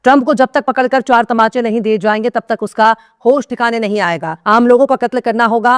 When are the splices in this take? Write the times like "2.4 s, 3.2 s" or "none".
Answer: 4.3 s